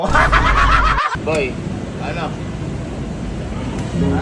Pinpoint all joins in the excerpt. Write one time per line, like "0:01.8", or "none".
0:01.2